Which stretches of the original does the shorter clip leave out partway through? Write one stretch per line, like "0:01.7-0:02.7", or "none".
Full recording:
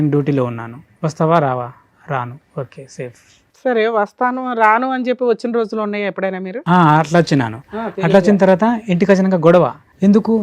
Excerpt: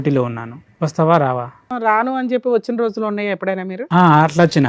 0:01.9-0:04.5

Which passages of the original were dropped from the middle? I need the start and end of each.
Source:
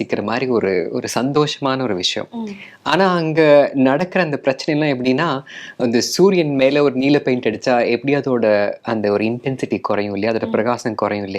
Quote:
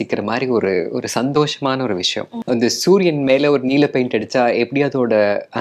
0:02.3-0:05.6

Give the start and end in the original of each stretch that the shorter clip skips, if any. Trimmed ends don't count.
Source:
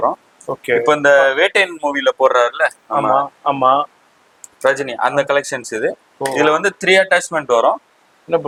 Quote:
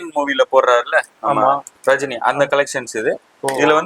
0:03.3-0:04.4

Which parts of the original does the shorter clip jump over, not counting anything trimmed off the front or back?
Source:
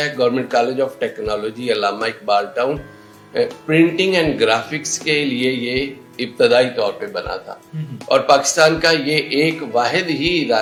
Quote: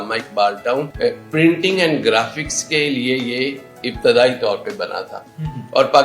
0:02.8-0:03.3

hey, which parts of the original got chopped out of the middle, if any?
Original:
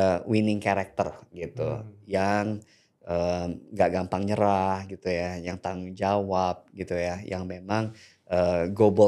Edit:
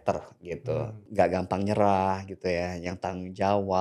0:01.9-0:03.6

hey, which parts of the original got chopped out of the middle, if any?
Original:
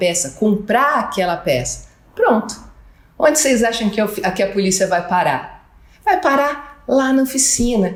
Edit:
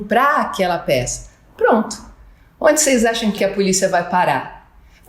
0:03.9-0:04.3

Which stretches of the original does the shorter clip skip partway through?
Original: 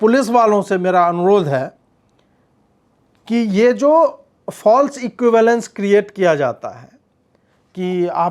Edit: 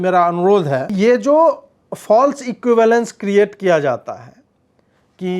0:01.7-0:03.5

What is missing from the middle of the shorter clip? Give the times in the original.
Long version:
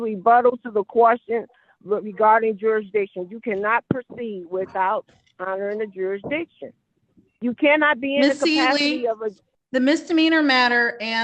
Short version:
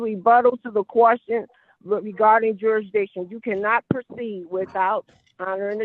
none

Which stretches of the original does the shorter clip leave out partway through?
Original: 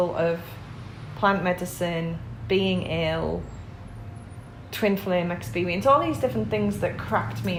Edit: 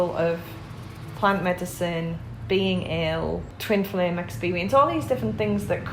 0:03.5-0:04.6

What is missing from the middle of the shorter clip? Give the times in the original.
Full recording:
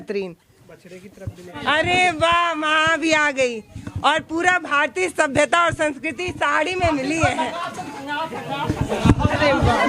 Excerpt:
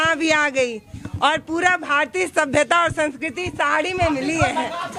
none

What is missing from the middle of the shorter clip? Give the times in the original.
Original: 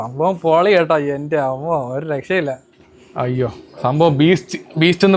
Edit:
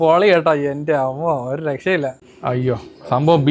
0:02.7-0:03.0

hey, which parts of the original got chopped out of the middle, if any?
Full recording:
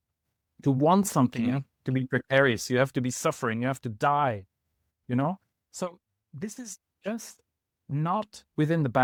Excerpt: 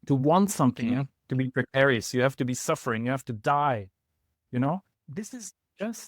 0:05.5-0:06.2

